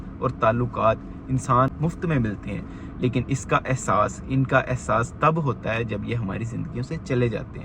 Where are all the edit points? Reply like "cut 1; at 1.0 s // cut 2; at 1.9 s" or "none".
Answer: cut 1; at 1.7 s

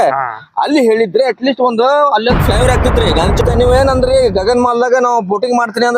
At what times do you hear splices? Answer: cut 1; at 3.4 s

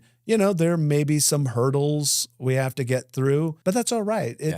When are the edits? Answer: cut 1; at 3.6 s

